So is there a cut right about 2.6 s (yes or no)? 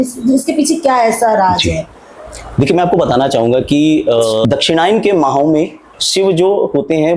no